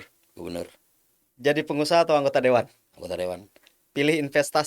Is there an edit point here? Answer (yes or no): no